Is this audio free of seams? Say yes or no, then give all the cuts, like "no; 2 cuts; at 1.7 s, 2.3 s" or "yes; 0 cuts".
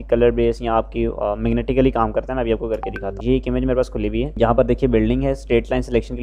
yes; 0 cuts